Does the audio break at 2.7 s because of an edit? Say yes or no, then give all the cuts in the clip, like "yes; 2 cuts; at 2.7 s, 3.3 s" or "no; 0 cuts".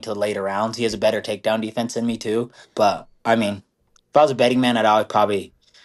yes; 1 cut; at 2.7 s